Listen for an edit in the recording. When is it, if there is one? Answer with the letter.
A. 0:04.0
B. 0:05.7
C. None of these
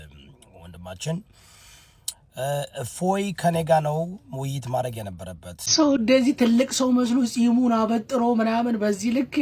B